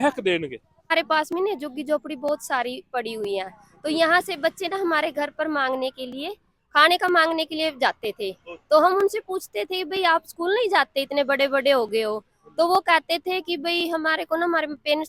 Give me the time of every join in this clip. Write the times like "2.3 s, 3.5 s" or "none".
0.9 s